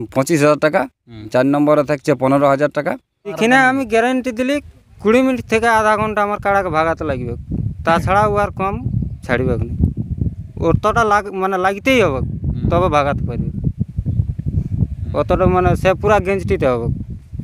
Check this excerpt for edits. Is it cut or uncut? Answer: cut